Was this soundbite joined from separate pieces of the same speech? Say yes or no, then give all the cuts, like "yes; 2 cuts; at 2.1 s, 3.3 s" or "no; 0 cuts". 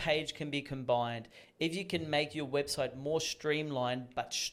no; 0 cuts